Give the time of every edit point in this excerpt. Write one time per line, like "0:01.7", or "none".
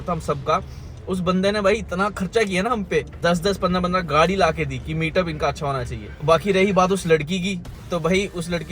0:03.1